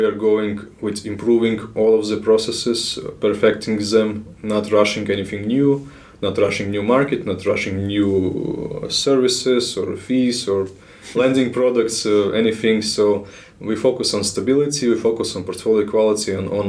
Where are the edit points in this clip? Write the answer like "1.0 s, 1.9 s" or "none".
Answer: none